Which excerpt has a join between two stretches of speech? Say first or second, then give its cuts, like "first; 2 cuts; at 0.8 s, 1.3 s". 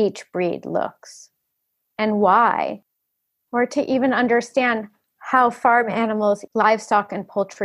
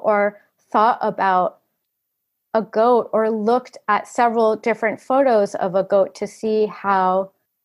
first; 1 cut; at 6.4 s